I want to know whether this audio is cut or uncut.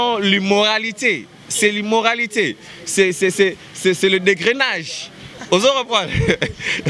uncut